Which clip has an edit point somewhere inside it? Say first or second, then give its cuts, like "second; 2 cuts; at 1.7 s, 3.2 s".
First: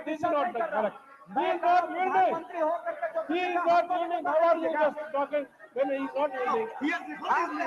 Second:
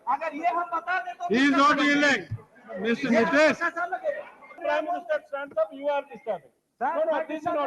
second; 1 cut; at 4.6 s